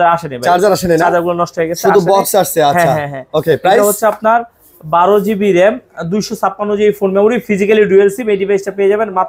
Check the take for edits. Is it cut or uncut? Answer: uncut